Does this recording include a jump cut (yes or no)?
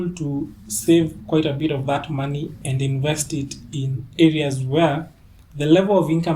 no